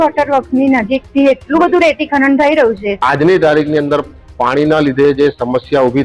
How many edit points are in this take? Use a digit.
1